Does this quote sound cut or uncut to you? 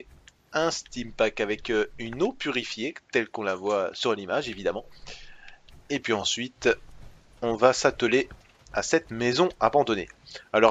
cut